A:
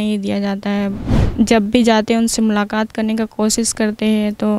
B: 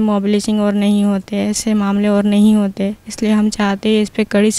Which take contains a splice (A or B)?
A